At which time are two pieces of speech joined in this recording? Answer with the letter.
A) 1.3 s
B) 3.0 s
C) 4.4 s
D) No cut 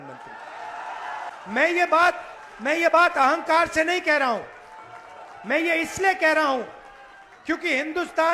A